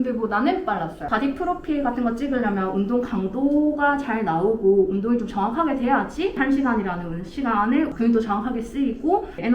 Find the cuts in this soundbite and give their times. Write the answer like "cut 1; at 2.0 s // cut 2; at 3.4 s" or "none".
none